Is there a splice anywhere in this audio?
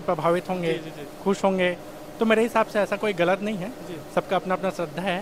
no; 0 cuts

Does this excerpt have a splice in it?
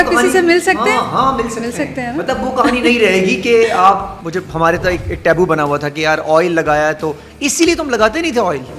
no; 0 cuts

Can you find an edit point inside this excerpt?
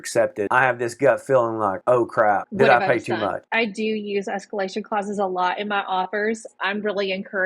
yes; 2 cuts; at 3.4 s, 6.6 s

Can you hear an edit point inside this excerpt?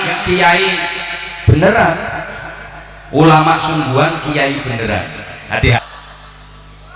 yes; 1 cut; at 5.8 s

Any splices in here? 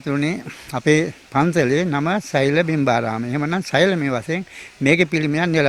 no; 0 cuts

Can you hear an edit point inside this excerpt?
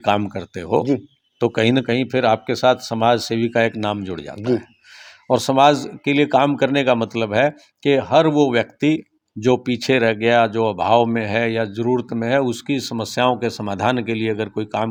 no; 0 cuts

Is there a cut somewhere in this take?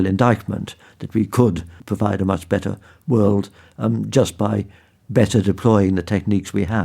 yes; 1 cut; at 1.7 s

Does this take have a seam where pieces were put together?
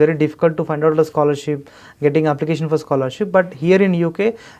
no; 0 cuts

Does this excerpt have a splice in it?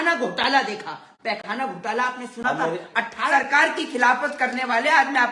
yes; 1 cut; at 3.2 s

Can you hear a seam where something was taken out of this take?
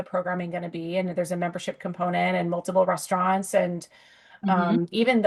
no; 0 cuts

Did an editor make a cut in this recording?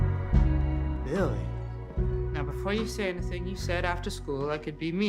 yes; 1 cut; at 3.8 s

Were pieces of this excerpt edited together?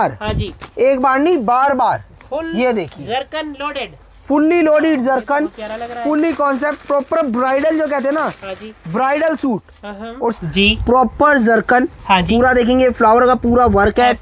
yes; 1 cut; at 10.4 s

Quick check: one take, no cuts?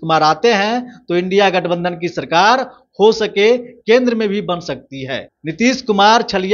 no; 1 cut; at 5.4 s

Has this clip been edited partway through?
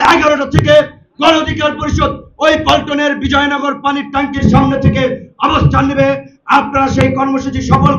no; 0 cuts

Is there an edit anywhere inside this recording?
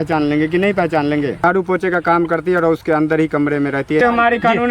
yes; 2 cuts; at 1.4 s, 4.0 s

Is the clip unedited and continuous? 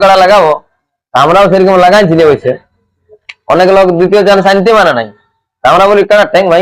yes; 0 cuts

